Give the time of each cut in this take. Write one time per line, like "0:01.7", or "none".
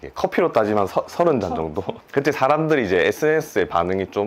0:01.9